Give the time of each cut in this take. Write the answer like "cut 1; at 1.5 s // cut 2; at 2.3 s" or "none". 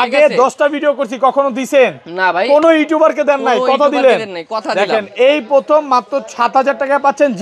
none